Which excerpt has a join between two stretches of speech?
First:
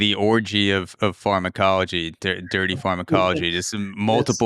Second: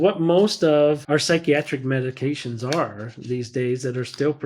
second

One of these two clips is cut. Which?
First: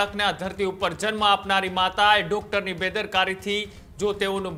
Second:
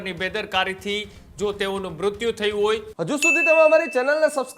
second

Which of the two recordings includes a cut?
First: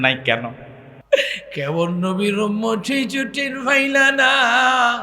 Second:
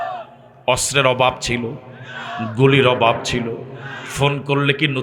first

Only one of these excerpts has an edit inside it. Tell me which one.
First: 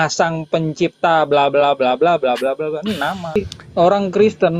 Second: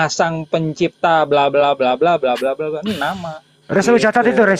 first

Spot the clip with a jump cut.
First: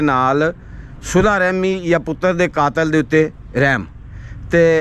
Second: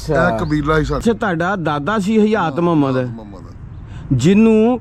second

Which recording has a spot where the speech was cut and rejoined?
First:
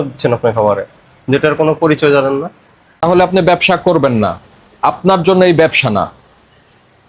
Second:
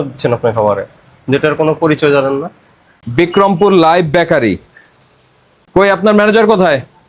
first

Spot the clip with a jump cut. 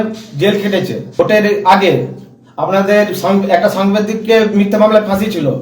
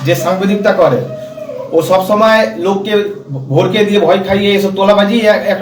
first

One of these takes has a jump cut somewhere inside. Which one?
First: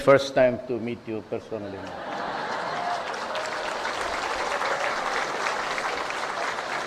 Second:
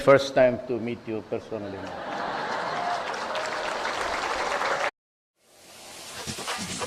first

